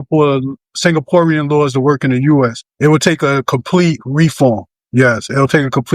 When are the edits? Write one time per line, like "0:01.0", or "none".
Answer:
0:02.6
0:04.7